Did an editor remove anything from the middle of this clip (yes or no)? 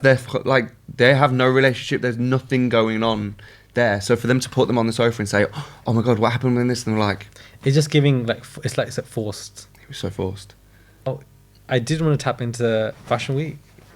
yes